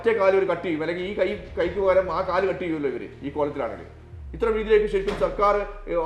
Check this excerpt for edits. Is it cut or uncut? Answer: uncut